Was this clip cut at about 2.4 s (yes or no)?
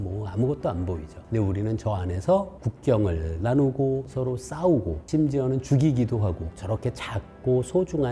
no